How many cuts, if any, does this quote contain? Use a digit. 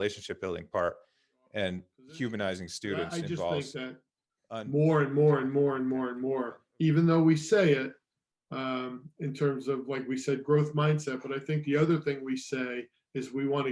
1